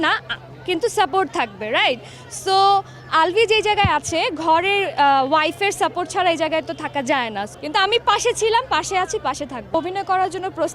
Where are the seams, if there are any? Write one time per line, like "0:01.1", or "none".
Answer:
none